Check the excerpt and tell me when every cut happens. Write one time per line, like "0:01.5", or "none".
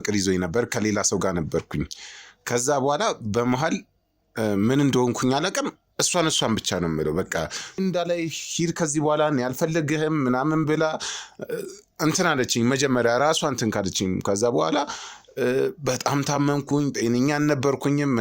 0:07.8